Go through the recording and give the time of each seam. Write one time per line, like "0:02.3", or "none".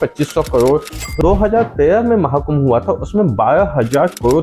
0:01.2